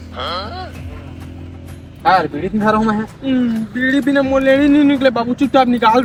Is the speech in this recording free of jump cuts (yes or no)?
yes